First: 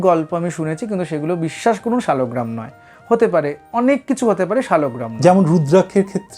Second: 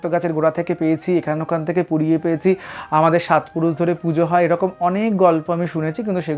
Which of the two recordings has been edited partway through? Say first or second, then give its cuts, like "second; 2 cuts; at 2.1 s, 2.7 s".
first; 1 cut; at 5.0 s